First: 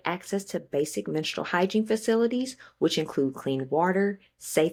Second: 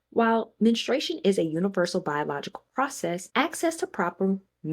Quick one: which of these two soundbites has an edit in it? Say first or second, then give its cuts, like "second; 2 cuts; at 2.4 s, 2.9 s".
second; 1 cut; at 3.3 s